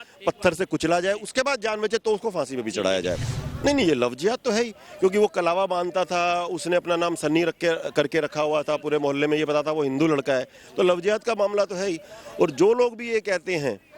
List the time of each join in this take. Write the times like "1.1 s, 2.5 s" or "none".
3.3 s